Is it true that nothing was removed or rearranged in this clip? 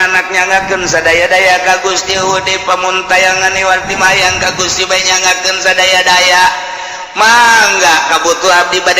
no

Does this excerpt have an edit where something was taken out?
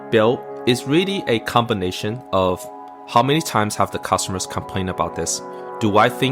no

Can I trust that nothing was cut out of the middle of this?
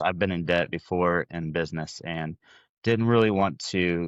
yes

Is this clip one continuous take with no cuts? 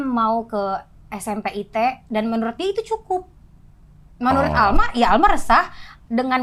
yes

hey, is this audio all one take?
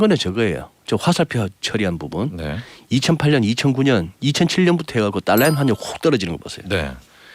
yes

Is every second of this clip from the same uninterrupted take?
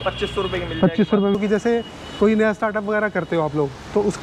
no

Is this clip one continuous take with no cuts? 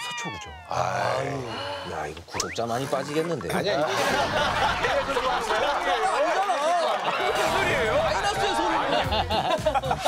no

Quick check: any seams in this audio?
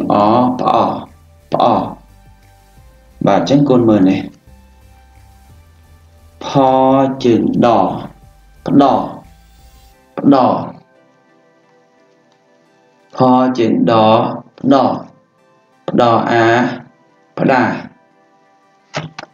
yes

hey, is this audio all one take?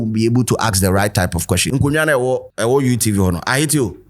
no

